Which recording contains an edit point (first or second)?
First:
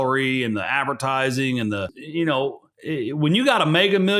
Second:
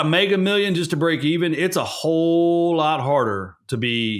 first